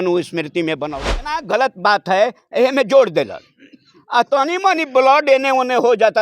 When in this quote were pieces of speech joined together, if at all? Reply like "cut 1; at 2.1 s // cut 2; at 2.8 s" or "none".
cut 1; at 1.0 s